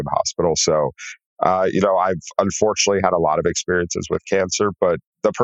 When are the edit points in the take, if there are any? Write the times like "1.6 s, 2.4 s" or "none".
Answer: none